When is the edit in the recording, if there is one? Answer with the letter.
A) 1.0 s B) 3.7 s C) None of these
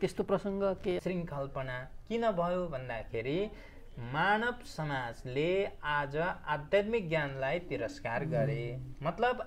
A